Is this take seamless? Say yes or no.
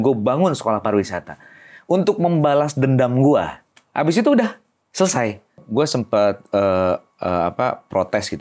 no